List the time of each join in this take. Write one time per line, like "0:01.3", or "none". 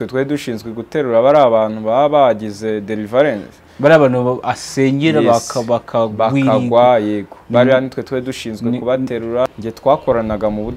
0:09.5